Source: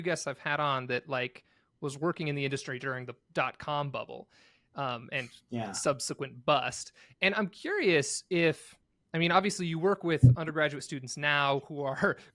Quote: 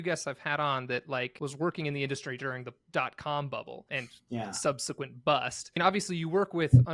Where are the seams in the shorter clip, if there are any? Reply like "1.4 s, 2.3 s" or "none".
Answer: 1.3 s, 3.9 s, 5.8 s